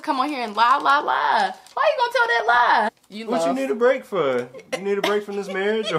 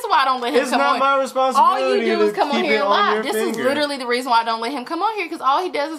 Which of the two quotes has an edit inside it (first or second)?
first